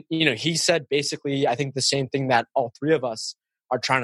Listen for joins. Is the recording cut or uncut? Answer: uncut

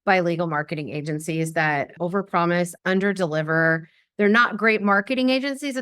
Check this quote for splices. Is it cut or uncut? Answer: cut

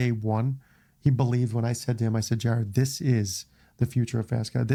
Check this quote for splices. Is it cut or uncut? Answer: uncut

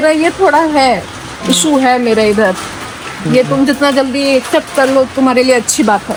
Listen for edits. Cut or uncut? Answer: uncut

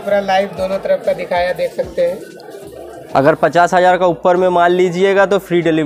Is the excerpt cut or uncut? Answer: cut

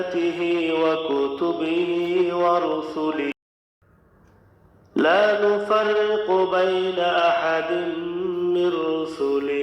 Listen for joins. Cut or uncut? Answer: cut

